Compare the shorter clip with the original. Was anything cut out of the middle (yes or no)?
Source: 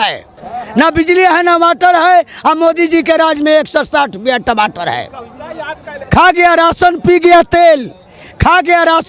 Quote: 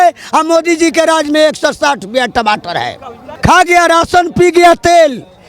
yes